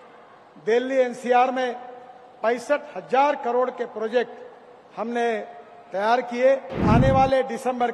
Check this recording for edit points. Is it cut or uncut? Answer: cut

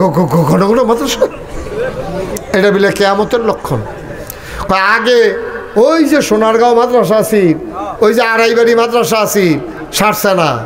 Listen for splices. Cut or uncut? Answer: uncut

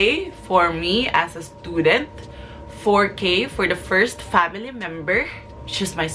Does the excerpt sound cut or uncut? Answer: uncut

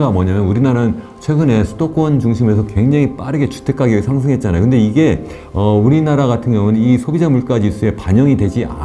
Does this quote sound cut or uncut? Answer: uncut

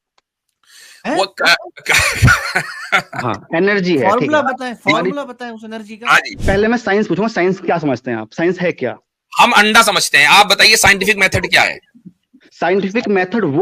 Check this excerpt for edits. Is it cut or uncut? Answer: cut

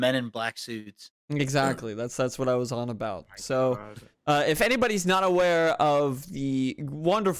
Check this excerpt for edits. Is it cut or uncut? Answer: uncut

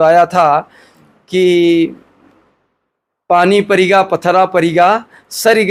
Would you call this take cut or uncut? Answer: uncut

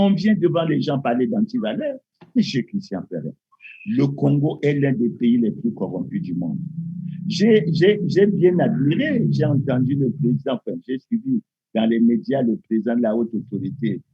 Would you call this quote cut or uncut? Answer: uncut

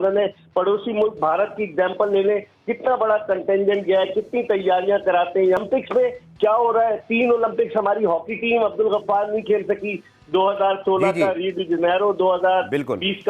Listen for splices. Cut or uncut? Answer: cut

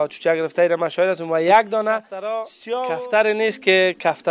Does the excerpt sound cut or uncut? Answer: cut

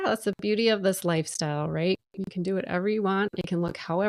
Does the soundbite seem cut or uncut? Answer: uncut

